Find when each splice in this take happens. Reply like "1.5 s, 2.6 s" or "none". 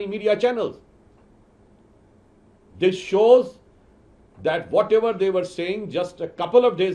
none